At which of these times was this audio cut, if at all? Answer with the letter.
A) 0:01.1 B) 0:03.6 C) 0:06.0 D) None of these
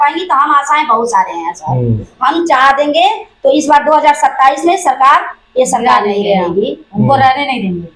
D